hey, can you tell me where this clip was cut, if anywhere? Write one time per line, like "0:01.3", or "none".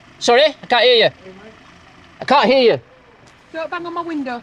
none